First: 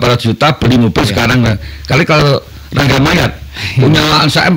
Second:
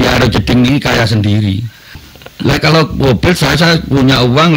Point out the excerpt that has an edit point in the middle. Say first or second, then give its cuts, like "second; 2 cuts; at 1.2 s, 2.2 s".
second; 1 cut; at 2.1 s